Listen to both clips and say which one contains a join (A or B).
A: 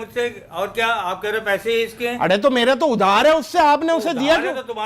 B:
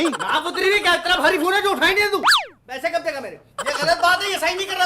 B